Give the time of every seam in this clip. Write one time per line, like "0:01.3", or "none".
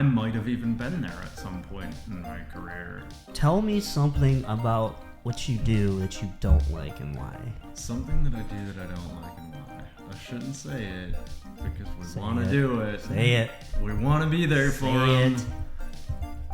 0:03.3
0:10.0

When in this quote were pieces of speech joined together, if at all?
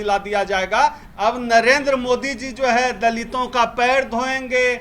0:01.0

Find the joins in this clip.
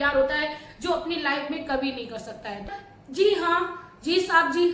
0:02.8

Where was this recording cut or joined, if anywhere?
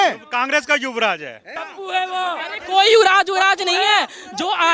0:01.6

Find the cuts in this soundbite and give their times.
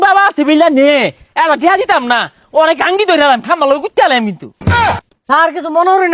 0:04.7

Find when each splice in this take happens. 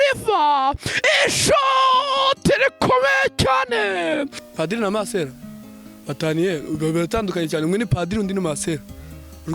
0:04.4

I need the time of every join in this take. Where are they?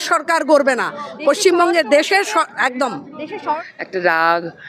0:03.7

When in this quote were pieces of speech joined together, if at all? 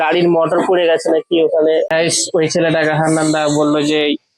0:01.9

